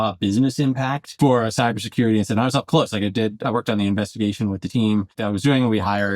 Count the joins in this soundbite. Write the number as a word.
two